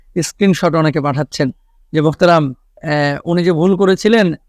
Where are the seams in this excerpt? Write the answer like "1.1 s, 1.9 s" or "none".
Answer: 2.8 s

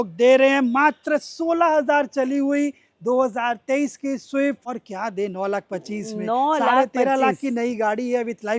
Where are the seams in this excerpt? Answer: 4.7 s

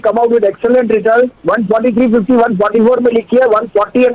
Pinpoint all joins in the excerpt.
1.3 s

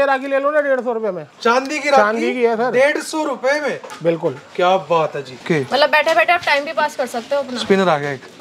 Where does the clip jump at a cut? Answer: 5.4 s

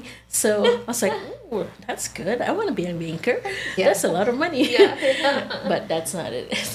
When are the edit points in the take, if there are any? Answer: none

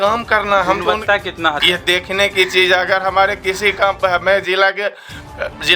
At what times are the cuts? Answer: 1.6 s

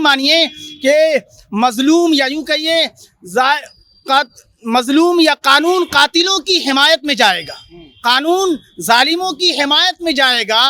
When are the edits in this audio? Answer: none

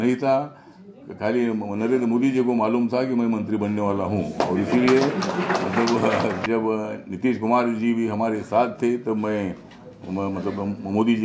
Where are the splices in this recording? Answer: 6.4 s

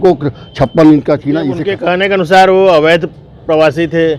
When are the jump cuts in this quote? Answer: 1.7 s

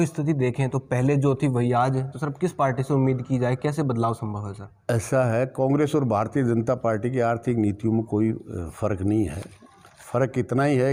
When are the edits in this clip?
none

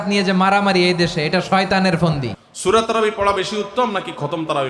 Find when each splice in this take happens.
2.4 s

